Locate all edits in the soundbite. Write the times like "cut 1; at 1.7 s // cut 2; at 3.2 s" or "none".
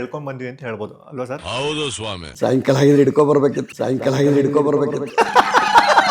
cut 1; at 2.2 s